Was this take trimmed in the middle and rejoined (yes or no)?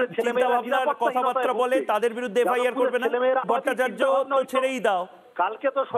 yes